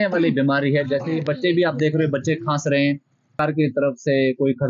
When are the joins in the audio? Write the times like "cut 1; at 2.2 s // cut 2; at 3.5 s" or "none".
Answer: cut 1; at 3.4 s